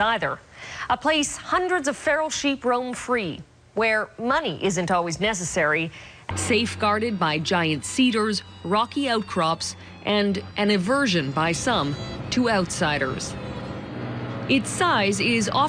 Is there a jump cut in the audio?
no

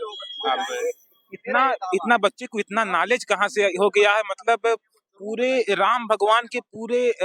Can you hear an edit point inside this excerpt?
no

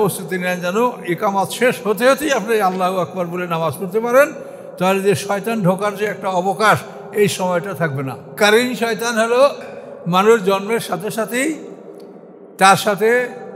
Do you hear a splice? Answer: yes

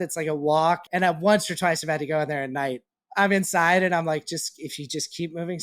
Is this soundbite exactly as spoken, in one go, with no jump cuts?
no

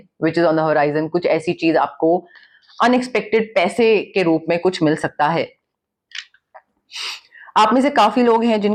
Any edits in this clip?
no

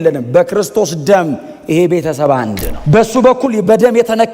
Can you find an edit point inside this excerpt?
yes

